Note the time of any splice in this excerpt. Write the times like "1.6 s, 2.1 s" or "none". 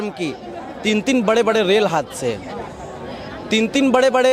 none